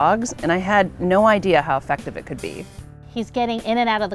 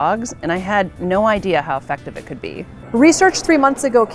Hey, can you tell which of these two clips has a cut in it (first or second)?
first